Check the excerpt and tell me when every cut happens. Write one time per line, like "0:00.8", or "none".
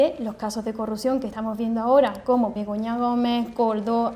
0:01.3
0:02.6